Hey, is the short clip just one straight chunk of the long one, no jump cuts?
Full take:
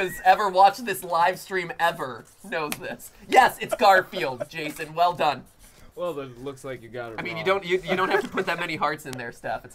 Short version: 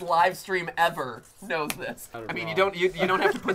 no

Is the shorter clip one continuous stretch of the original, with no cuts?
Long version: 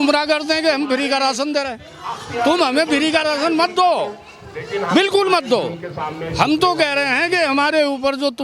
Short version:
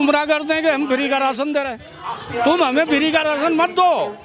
yes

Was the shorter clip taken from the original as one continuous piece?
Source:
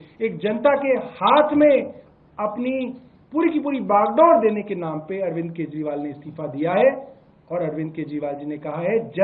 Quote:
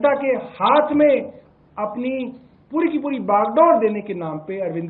yes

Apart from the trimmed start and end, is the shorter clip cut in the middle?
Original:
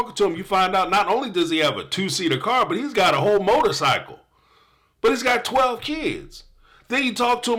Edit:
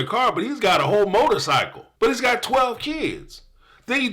yes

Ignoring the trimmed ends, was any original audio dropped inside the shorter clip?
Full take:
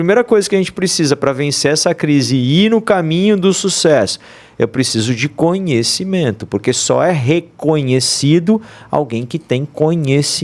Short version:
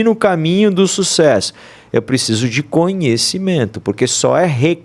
no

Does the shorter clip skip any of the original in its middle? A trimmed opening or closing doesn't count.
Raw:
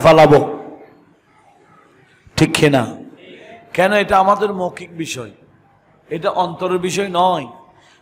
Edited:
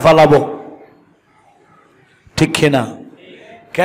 no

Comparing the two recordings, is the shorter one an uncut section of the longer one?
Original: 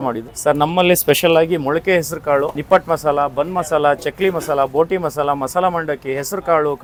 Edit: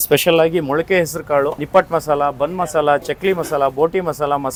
yes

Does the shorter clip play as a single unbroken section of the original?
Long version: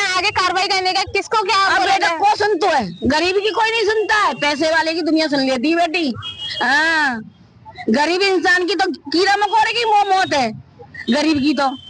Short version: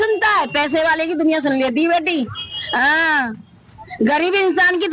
yes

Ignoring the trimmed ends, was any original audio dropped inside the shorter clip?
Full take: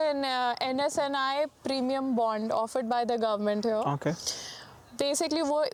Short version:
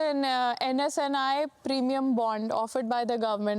no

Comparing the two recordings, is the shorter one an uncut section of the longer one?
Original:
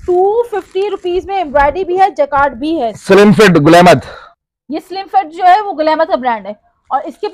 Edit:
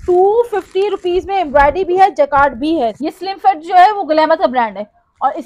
no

